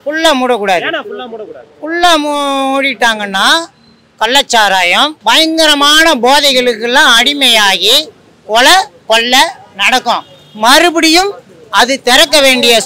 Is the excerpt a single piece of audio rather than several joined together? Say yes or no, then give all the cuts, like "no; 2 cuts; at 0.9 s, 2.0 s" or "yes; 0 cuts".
yes; 0 cuts